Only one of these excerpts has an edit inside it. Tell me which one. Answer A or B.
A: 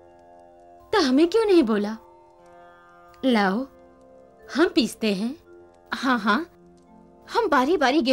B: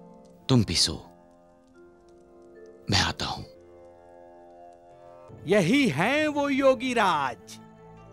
B